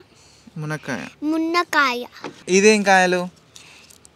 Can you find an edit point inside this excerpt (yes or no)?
yes